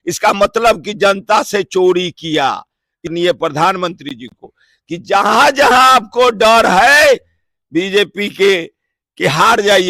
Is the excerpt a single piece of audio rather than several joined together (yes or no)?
no